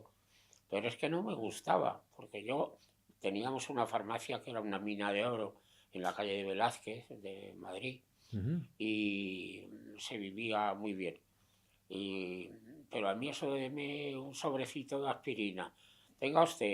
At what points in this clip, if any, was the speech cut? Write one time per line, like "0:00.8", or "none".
none